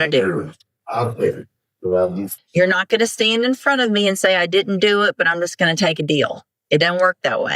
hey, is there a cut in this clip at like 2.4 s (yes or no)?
yes